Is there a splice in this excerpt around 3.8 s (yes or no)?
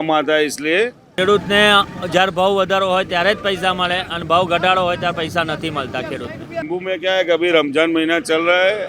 no